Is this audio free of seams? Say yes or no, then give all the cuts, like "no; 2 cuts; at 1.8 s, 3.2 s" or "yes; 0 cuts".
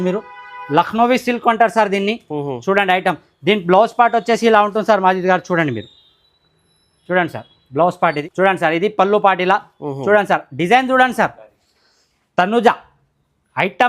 no; 1 cut; at 8.2 s